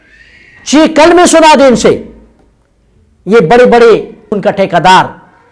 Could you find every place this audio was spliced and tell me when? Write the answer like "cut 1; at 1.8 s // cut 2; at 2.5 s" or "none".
cut 1; at 4.2 s